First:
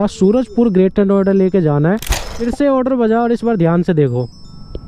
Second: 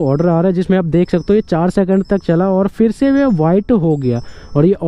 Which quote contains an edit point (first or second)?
first